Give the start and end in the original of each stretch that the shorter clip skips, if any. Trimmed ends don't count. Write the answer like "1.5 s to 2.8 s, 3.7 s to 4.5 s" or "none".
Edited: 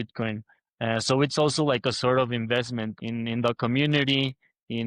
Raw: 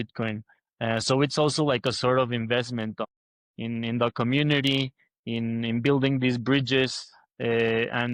2.9 s to 3.5 s